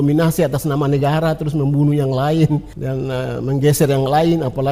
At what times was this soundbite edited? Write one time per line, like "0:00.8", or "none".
0:02.8